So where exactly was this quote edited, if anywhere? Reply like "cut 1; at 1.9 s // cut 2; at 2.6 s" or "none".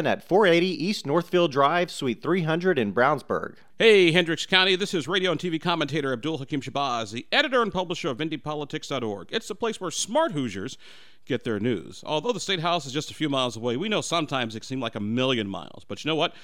cut 1; at 3.6 s